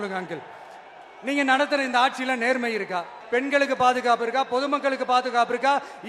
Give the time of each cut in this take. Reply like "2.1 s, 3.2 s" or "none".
3.2 s